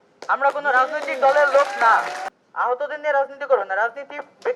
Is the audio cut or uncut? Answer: cut